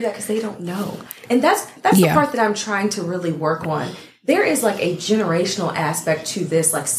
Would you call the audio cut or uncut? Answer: uncut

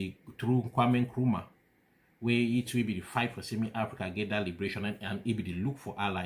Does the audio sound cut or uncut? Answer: uncut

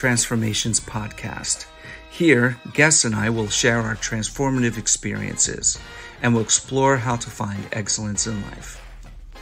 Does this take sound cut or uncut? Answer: uncut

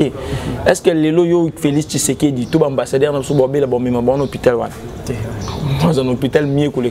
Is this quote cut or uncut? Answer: uncut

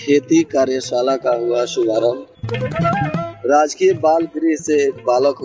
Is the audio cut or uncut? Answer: uncut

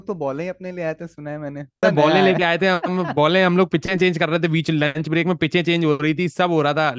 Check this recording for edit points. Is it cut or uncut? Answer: cut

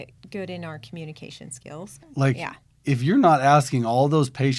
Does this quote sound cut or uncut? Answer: cut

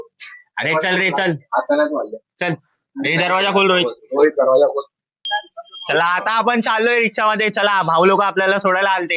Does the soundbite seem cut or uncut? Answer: cut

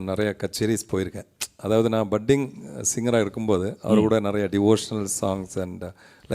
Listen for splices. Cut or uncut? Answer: uncut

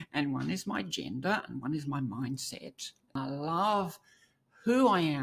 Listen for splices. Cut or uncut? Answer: cut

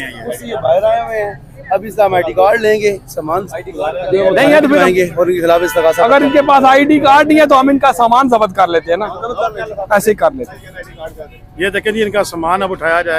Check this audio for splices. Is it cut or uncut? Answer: uncut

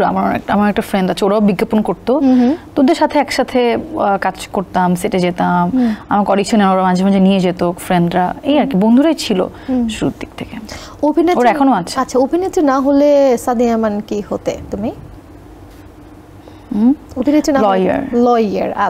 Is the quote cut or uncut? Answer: uncut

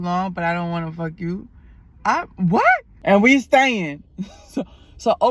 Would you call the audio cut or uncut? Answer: cut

